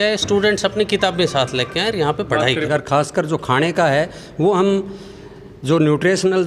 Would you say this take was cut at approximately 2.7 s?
yes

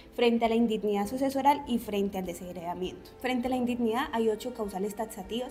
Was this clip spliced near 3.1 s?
yes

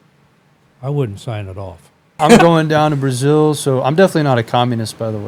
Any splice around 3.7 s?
no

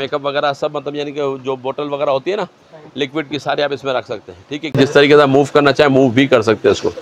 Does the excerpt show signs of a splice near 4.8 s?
yes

